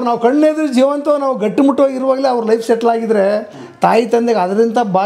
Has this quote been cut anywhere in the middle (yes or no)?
no